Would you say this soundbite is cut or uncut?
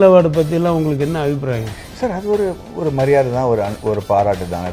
uncut